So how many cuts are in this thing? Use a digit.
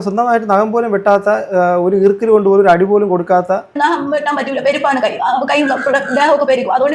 1